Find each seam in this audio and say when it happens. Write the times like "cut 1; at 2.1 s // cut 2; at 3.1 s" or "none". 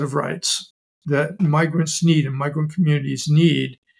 cut 1; at 1.3 s